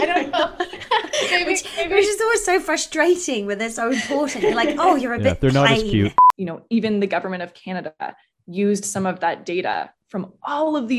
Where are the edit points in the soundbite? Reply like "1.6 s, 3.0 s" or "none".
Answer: 6.3 s